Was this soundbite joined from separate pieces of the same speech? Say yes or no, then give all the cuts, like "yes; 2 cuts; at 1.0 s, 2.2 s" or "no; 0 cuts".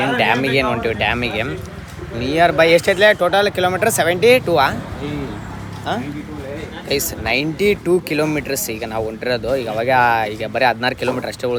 no; 0 cuts